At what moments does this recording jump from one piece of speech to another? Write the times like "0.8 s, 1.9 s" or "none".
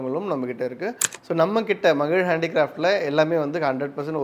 1.0 s